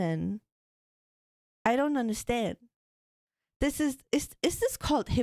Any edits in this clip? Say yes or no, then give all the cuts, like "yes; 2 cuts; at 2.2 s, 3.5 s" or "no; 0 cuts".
no; 0 cuts